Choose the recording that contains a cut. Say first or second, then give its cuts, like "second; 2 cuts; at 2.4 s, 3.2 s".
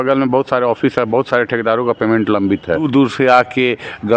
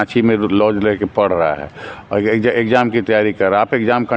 first; 1 cut; at 2.9 s